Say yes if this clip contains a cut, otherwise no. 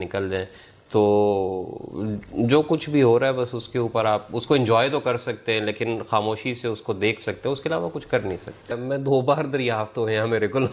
yes